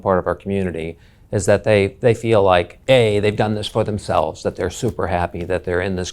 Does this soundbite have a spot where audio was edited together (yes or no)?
yes